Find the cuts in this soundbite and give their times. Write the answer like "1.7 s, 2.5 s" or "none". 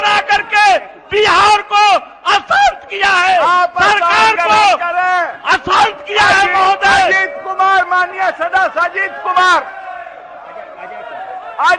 none